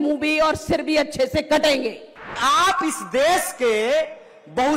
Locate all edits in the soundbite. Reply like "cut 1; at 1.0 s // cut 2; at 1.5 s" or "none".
cut 1; at 2.4 s